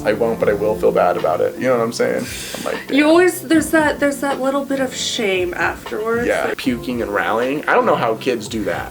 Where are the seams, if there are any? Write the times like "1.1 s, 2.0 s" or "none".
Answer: 6.5 s